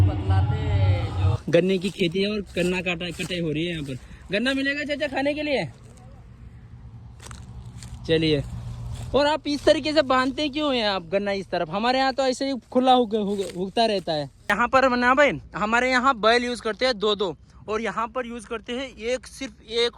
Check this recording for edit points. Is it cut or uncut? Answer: cut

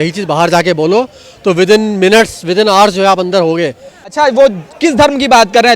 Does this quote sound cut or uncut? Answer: cut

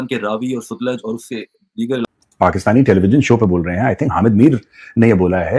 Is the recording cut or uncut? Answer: cut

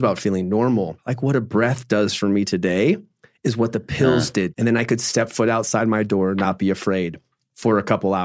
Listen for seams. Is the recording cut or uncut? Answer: cut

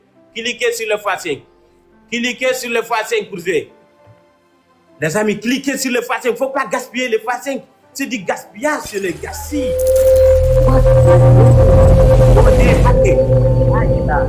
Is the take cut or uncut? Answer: uncut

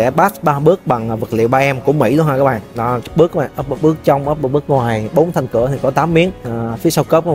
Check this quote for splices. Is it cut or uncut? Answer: cut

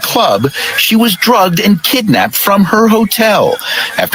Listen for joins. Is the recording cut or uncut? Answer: uncut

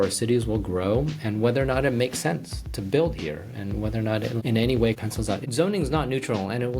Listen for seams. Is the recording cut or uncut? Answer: cut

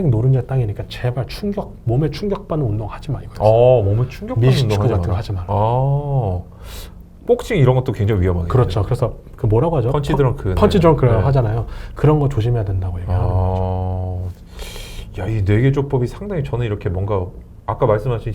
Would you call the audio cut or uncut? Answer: uncut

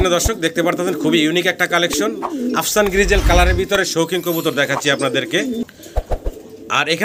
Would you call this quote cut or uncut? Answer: uncut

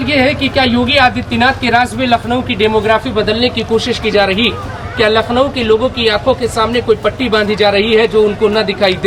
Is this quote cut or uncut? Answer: uncut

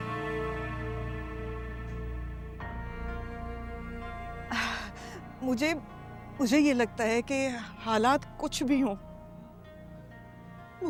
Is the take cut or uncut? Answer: uncut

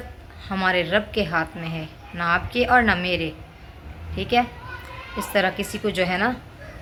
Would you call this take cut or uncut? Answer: uncut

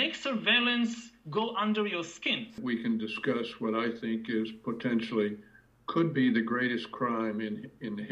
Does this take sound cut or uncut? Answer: cut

